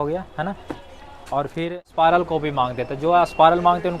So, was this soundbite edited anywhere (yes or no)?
yes